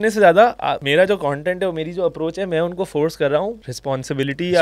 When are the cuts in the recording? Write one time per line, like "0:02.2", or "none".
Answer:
0:00.8
0:03.7

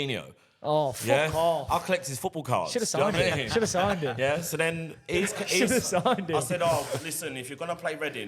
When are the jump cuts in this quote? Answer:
none

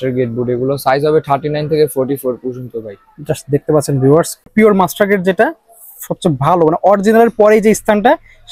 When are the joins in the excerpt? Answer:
0:04.5

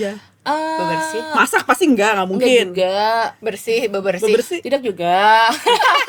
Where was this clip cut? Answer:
none

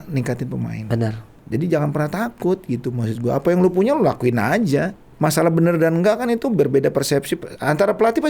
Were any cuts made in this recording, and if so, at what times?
0:01.3
0:05.0

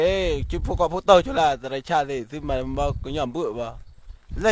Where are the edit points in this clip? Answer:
none

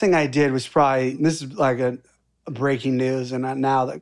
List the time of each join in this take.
0:01.1

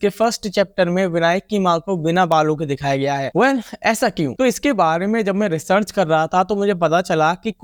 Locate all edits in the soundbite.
none

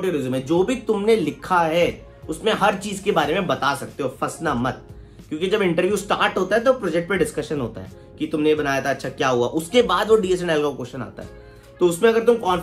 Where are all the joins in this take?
none

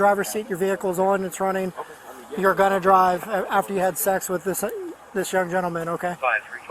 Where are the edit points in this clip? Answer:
none

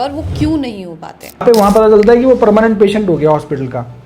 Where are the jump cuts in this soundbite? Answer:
0:01.4

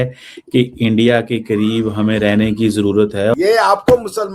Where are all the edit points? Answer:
0:03.3

